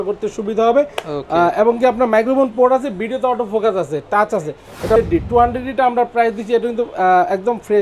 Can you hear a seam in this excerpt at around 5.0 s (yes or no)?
yes